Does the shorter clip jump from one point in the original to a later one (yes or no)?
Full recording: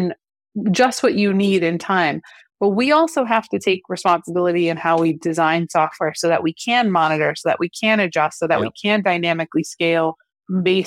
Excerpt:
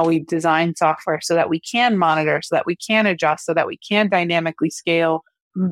no